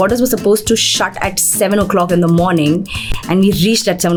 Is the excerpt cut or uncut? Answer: uncut